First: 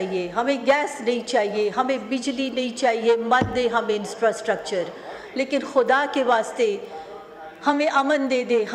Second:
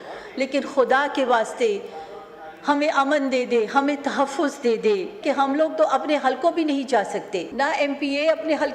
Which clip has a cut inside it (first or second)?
second